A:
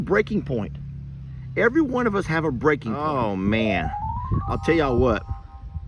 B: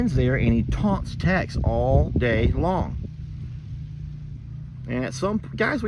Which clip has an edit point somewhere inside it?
A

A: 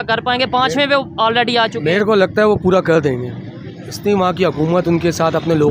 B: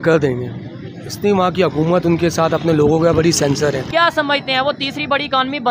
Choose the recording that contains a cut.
B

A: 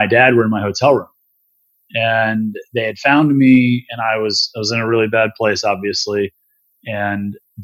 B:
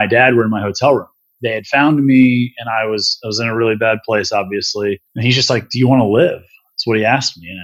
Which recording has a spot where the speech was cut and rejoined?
B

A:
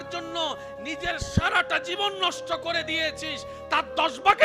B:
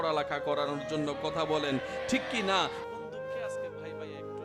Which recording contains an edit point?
B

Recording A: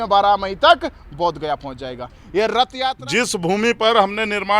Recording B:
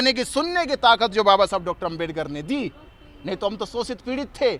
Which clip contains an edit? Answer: A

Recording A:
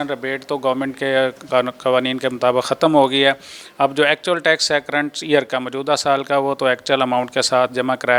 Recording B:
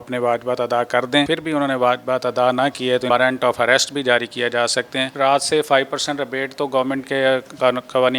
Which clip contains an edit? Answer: B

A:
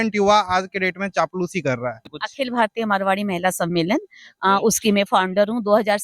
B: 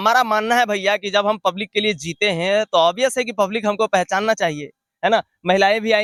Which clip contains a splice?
A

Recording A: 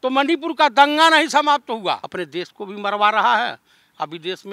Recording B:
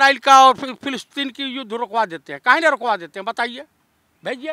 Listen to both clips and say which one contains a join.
A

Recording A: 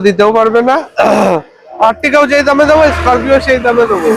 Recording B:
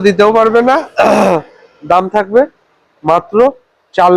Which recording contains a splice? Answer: A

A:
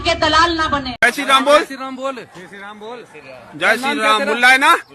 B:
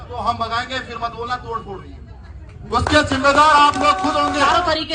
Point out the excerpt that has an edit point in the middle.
A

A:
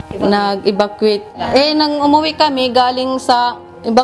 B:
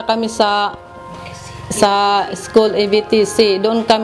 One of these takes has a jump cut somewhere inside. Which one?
A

